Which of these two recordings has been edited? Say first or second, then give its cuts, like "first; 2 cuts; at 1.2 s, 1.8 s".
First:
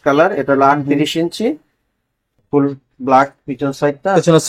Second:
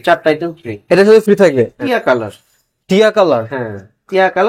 second; 1 cut; at 1.8 s